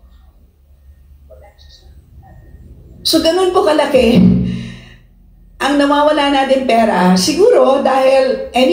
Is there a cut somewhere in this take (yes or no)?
no